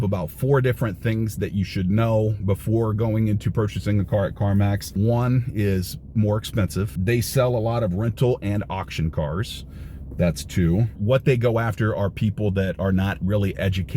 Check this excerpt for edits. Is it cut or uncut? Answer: cut